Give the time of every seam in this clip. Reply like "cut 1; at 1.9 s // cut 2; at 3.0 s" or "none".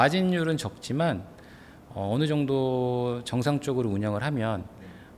none